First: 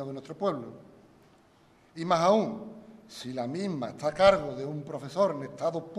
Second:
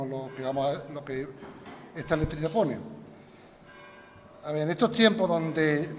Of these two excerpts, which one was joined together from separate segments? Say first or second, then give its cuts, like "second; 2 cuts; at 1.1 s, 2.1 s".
second; 1 cut; at 3.9 s